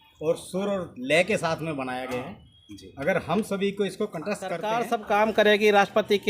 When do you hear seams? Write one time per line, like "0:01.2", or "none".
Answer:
0:04.6